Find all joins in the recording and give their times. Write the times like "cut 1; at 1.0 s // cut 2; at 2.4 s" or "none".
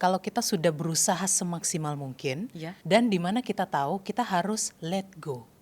cut 1; at 2.7 s